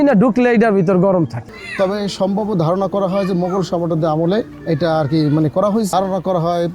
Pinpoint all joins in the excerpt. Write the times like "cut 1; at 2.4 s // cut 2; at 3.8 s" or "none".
cut 1; at 1.5 s // cut 2; at 5.9 s

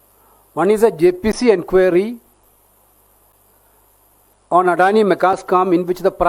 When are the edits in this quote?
none

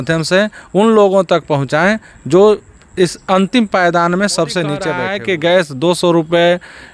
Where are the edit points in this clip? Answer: cut 1; at 5.0 s

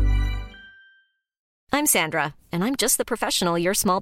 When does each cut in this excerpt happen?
cut 1; at 1.4 s

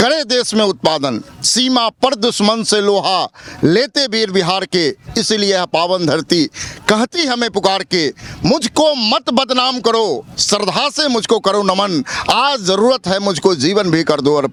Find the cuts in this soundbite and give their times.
none

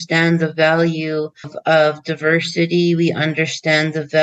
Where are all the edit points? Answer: cut 1; at 1.5 s

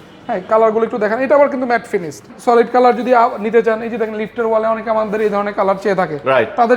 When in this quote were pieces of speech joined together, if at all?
cut 1; at 2.3 s

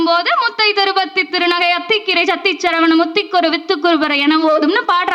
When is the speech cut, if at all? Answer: none

